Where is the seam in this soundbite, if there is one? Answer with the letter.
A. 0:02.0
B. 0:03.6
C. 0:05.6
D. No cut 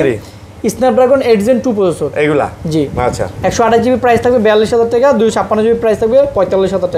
D